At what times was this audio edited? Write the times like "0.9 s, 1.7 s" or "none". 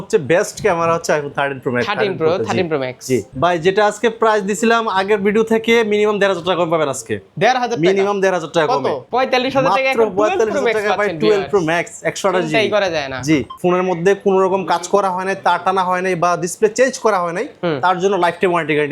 3.2 s, 9.0 s, 13.5 s